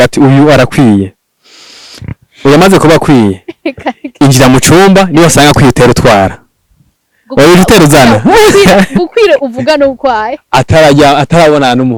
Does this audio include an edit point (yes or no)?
no